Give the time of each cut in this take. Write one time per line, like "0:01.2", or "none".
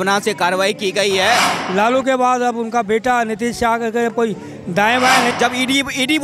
0:01.5
0:05.3